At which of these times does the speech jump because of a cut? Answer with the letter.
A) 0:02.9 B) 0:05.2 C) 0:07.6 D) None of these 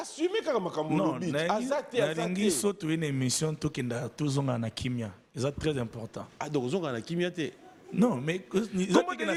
D